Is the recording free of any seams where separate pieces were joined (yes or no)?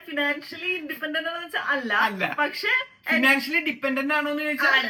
yes